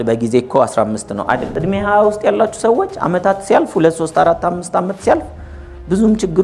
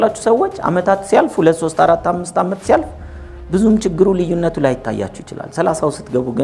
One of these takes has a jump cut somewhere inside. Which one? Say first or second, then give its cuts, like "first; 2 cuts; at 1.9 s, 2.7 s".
first; 1 cut; at 1.5 s